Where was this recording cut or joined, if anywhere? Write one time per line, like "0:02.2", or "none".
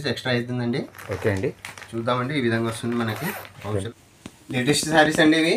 0:03.9